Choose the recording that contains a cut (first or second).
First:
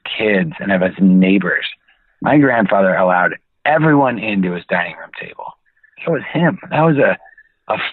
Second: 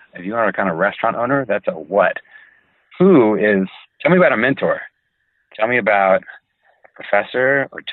second